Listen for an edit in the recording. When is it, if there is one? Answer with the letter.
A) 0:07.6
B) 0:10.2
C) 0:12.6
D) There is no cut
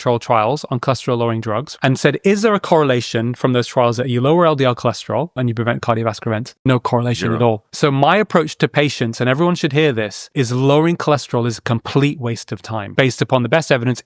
A